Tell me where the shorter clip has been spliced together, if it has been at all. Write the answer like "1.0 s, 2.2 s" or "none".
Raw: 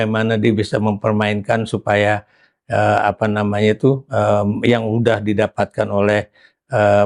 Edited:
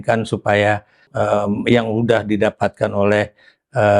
1.1 s